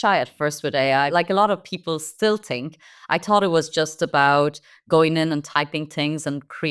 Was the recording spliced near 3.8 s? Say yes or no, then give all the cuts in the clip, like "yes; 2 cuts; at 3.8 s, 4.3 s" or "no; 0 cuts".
no; 1 cut; at 1.1 s